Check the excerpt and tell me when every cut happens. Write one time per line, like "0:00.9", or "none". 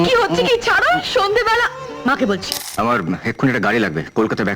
0:02.6